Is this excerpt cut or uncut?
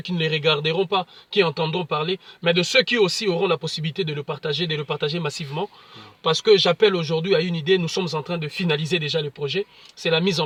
uncut